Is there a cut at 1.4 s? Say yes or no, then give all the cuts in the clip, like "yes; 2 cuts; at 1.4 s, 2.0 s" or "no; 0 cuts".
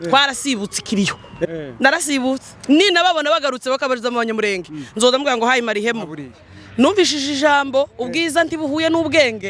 yes; 2 cuts; at 1.4 s, 6.3 s